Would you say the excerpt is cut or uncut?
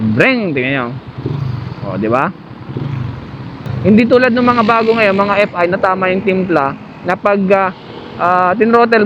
cut